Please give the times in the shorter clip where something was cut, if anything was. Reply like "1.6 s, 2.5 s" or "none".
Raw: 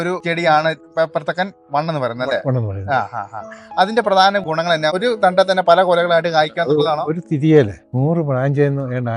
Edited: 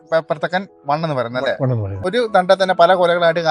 2.0 s